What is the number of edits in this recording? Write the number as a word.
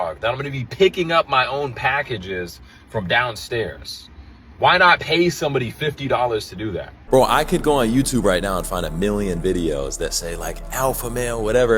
one